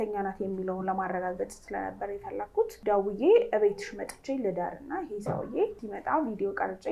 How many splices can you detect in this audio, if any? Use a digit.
2